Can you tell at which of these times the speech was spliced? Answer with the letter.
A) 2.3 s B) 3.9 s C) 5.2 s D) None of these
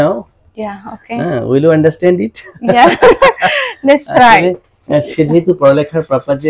D